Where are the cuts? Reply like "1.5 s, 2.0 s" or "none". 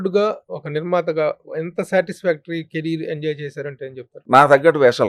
4.2 s